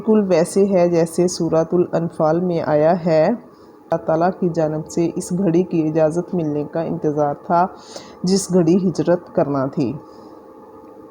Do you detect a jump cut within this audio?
yes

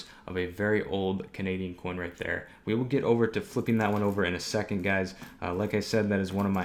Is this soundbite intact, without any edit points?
yes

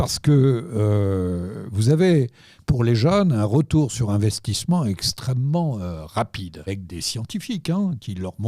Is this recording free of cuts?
no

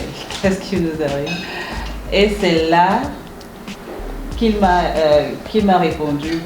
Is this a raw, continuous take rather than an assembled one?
yes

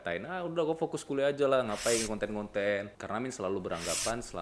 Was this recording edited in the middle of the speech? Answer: yes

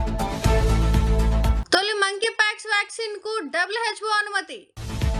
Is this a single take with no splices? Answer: yes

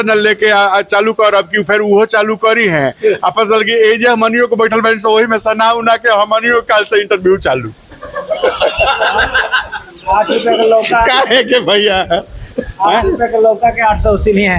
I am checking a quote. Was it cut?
no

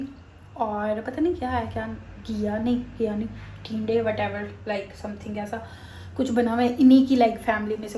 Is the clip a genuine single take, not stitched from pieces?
yes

